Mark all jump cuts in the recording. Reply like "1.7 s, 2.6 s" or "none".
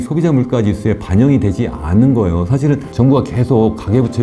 2.9 s